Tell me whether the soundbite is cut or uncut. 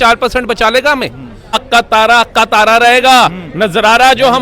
cut